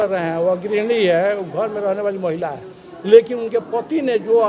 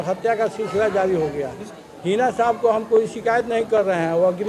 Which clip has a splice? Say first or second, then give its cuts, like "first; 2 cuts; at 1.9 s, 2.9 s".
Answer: second; 1 cut; at 1.6 s